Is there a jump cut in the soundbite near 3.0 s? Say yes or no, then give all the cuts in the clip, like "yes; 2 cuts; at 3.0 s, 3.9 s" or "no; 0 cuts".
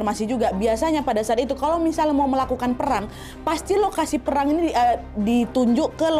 no; 0 cuts